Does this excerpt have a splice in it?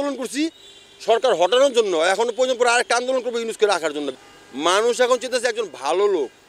yes; 1 cut; at 4.1 s

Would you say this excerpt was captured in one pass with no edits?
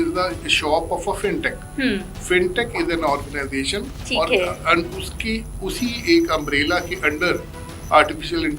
yes; 0 cuts

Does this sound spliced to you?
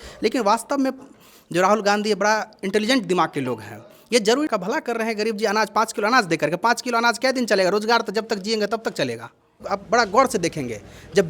yes; 2 cuts; at 4.5 s, 9.6 s

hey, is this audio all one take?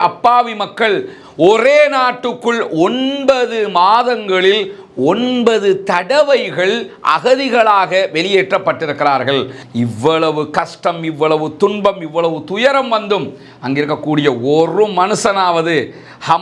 no; 1 cut; at 9.6 s

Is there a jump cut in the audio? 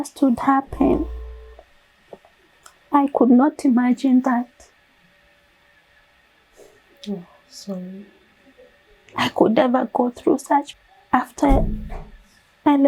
yes; 1 cut; at 10.7 s

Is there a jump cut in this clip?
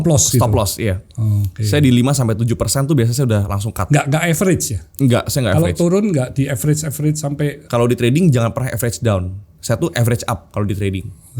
yes; 1 cut; at 7.6 s

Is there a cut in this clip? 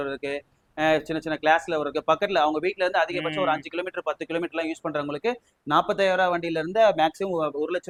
no; 0 cuts

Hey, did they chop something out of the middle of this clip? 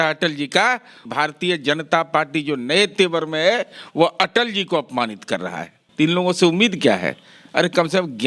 yes; 2 cuts; at 1.0 s, 5.8 s

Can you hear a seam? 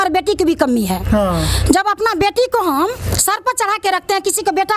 no; 0 cuts

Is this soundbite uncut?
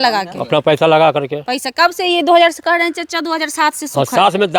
yes; 0 cuts

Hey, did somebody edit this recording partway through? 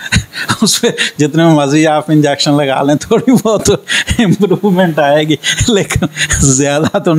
no; 0 cuts

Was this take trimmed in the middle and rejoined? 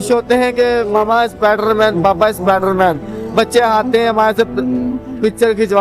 no; 0 cuts

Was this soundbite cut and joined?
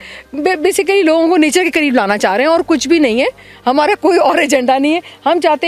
no; 0 cuts

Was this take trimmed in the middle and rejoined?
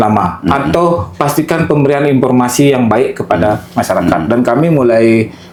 no; 0 cuts

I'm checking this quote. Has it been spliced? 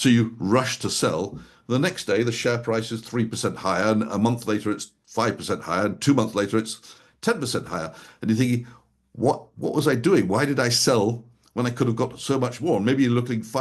no; 0 cuts

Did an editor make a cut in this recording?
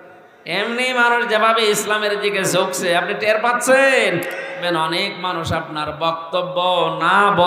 yes; 1 cut; at 4.6 s

